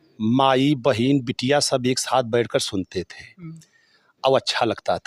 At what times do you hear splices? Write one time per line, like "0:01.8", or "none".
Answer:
none